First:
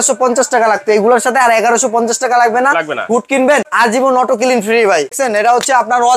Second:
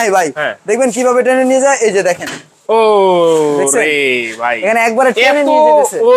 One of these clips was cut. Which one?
first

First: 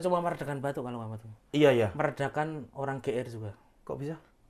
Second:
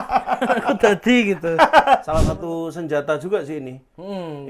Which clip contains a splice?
second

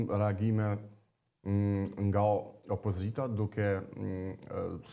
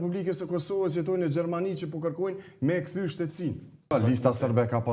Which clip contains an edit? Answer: second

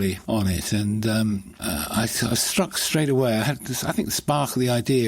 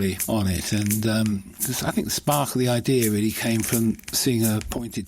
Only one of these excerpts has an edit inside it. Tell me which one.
second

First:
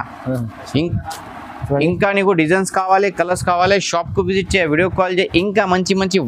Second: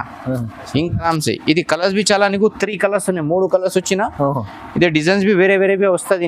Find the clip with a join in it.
second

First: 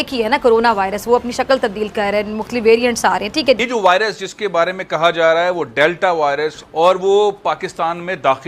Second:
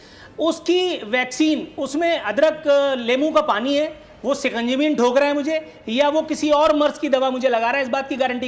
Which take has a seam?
first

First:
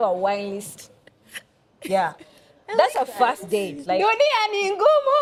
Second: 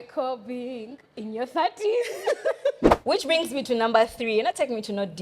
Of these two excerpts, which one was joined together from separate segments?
second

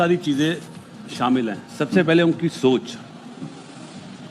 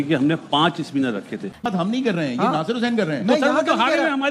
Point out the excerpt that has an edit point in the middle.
second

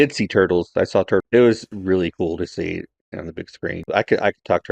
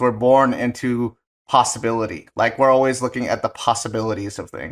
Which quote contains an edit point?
first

